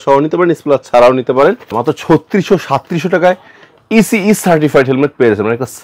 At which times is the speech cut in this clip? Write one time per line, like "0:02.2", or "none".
0:01.8